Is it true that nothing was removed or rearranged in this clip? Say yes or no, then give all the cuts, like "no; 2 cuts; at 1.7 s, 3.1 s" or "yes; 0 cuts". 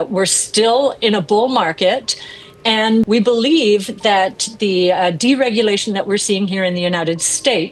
no; 1 cut; at 3.1 s